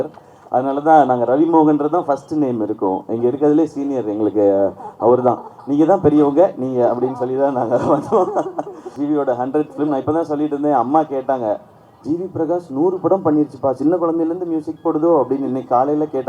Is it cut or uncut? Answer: cut